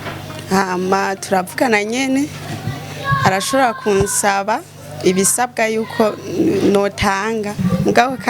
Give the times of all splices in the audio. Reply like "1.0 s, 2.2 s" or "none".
none